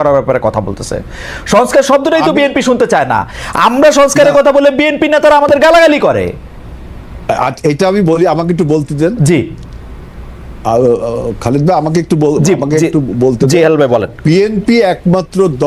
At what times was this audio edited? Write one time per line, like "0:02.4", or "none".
none